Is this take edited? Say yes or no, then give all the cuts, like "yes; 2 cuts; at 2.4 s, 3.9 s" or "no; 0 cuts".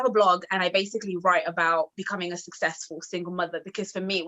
no; 0 cuts